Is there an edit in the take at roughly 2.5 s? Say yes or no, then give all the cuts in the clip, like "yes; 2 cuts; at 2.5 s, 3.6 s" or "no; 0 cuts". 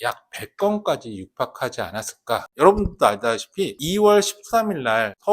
yes; 1 cut; at 2.5 s